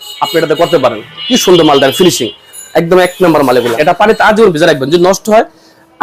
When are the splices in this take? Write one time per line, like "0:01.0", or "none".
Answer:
0:03.8